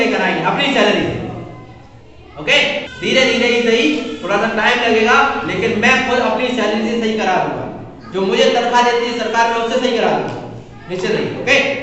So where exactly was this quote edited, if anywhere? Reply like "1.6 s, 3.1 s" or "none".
2.9 s